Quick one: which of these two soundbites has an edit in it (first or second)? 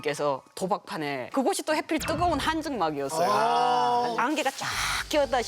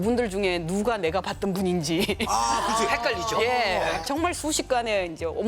first